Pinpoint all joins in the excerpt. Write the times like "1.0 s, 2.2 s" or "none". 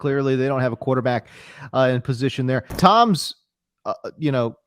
2.7 s